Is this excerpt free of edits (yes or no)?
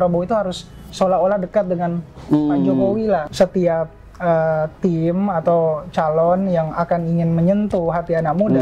no